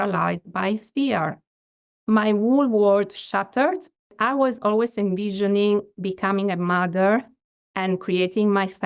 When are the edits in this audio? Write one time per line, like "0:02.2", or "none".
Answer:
0:04.1